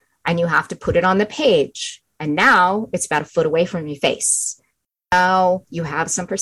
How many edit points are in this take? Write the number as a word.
zero